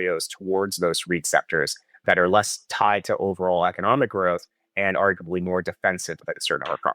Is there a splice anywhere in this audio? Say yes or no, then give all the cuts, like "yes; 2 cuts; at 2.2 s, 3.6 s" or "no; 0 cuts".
no; 0 cuts